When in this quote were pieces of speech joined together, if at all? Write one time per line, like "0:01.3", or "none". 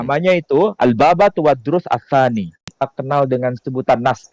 0:02.7